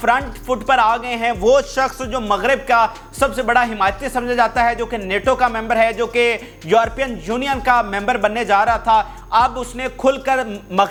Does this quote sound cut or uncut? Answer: uncut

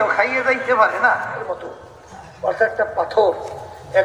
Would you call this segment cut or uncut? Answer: cut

